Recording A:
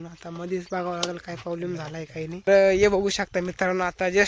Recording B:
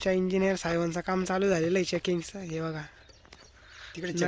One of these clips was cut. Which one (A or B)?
A